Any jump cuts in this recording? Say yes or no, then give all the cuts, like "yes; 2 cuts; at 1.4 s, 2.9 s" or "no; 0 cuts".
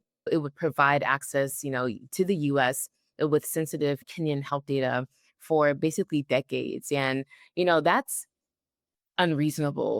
no; 0 cuts